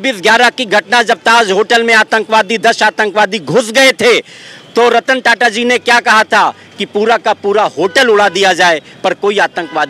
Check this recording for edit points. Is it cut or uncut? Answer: uncut